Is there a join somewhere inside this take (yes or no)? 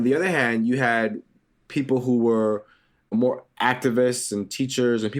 no